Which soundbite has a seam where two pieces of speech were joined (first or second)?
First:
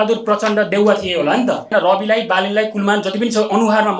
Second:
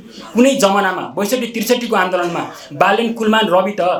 first